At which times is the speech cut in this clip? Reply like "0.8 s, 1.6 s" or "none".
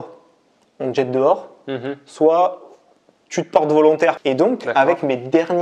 4.2 s